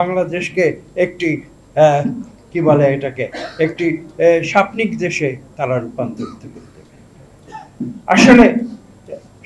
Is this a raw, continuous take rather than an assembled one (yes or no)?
yes